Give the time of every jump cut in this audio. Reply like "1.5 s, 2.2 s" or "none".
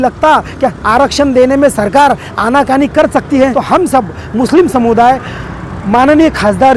3.6 s